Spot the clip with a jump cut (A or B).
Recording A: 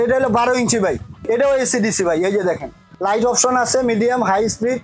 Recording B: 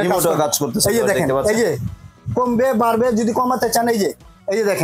A